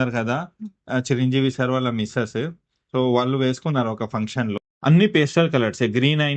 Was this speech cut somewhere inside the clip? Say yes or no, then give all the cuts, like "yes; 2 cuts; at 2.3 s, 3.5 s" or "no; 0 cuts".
yes; 1 cut; at 4.6 s